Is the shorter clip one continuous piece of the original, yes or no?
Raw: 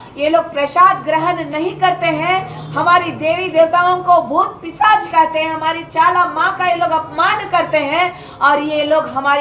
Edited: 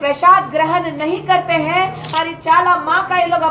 no